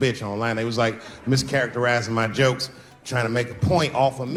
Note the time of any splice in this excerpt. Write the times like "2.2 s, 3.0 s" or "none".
none